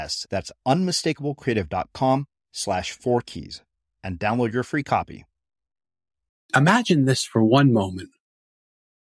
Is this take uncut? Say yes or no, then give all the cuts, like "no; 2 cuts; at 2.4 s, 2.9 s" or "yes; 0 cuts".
no; 1 cut; at 6.4 s